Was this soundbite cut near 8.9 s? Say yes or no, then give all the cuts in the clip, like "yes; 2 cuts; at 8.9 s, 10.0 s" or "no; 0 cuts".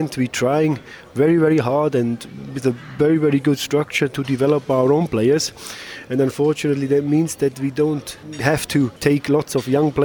yes; 1 cut; at 8.9 s